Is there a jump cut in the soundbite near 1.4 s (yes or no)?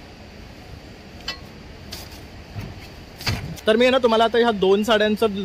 no